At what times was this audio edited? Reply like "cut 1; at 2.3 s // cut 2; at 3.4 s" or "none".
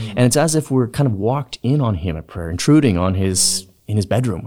none